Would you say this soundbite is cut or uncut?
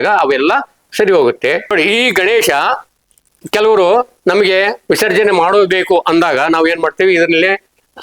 cut